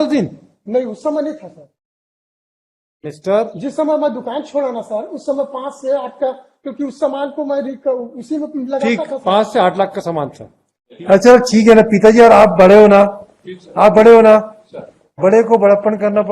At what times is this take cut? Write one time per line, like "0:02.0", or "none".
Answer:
0:10.8